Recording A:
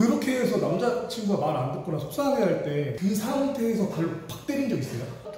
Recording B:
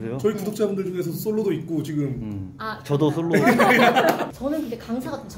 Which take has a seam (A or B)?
B